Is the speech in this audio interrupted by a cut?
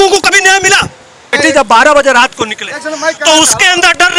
yes; 1 cut; at 1.3 s

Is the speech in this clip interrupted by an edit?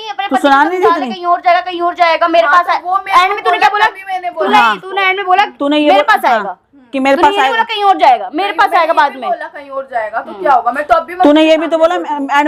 no; 0 cuts

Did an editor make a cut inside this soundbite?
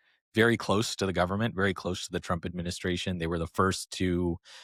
no; 0 cuts

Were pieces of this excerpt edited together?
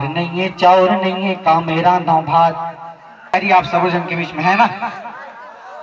yes; 1 cut; at 3.3 s

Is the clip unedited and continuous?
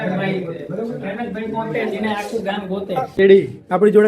no; 1 cut; at 3.0 s

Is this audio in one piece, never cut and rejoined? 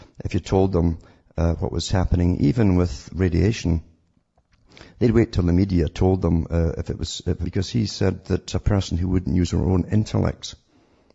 yes; 0 cuts

